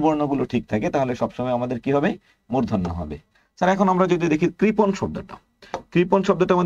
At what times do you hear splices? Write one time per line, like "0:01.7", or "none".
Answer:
none